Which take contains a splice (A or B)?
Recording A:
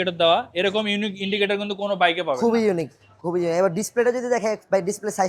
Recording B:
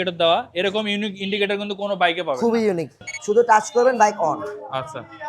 B